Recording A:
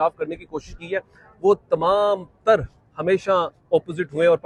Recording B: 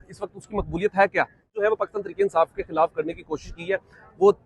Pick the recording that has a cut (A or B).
B